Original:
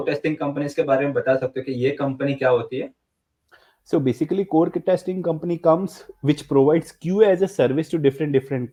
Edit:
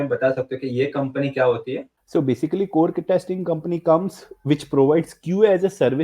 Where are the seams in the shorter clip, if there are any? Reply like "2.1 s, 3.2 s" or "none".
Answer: 1.9 s